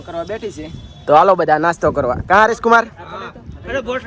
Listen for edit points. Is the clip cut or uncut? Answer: uncut